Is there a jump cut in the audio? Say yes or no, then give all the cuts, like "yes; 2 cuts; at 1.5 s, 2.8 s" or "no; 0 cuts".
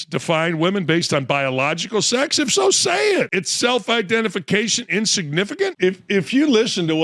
yes; 1 cut; at 5.7 s